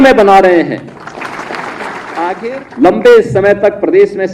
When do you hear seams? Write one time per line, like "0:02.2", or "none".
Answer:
0:02.4